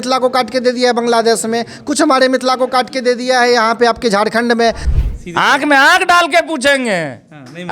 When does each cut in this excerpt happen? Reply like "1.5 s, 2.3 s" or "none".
4.9 s